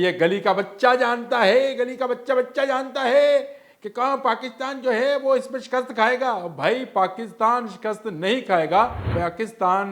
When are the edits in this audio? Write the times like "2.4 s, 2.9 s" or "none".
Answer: 9.0 s